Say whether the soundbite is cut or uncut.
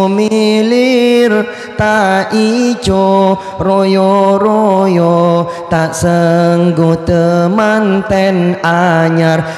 uncut